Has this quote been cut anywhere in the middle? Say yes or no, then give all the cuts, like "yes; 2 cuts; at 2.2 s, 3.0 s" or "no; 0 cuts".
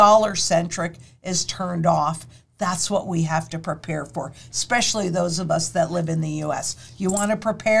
no; 0 cuts